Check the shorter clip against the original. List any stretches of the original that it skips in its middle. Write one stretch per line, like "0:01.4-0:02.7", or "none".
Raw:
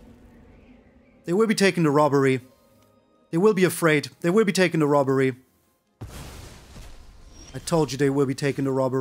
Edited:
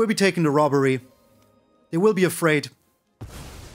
0:04.1-0:05.5